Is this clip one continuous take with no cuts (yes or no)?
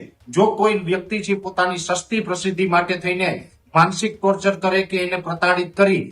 yes